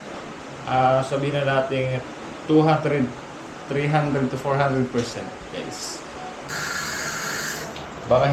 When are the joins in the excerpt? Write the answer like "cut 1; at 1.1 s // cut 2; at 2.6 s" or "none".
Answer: cut 1; at 6.5 s

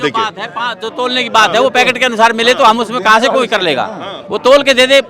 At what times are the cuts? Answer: none

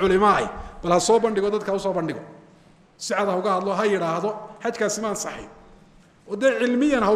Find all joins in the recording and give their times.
none

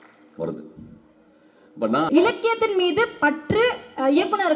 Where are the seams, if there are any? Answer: cut 1; at 2.1 s

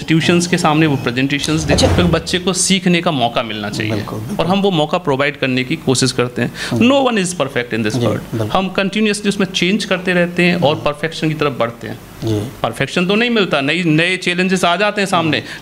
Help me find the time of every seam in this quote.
cut 1; at 1.9 s

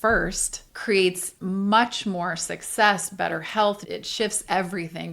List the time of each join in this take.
cut 1; at 1.3 s // cut 2; at 3.8 s

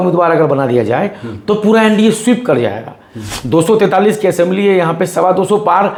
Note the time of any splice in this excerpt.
none

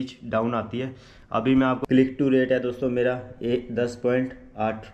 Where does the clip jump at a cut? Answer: cut 1; at 1.8 s

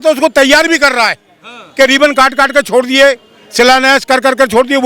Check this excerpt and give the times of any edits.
none

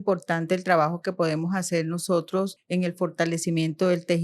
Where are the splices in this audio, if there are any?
cut 1; at 2.6 s

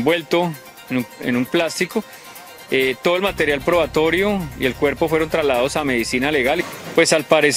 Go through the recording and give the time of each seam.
cut 1; at 6.7 s

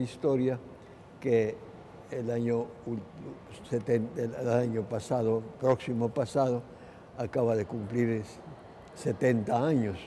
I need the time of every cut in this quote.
cut 1; at 3.0 s

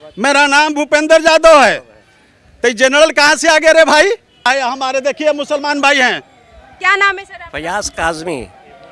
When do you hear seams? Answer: cut 1; at 4.5 s

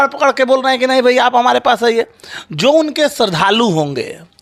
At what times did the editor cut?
none

